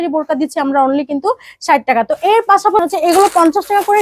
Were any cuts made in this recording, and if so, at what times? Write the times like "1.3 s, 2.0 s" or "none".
2.8 s